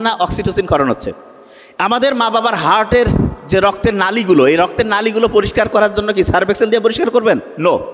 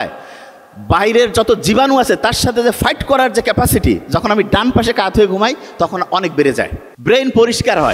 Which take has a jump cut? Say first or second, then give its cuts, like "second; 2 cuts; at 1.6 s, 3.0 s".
second; 1 cut; at 6.8 s